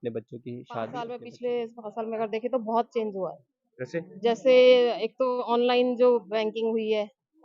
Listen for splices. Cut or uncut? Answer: cut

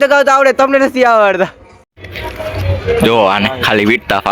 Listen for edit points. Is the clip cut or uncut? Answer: cut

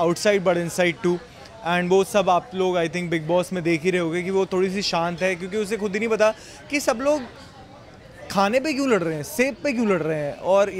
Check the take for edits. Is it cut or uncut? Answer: uncut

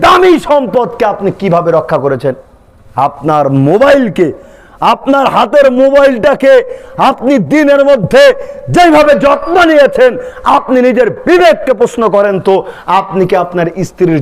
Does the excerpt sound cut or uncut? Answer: uncut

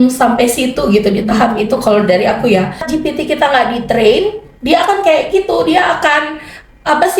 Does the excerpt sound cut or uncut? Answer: cut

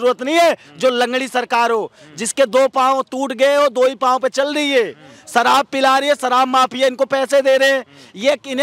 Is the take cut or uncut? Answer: uncut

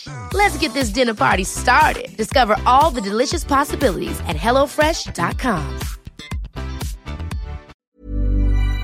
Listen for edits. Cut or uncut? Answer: cut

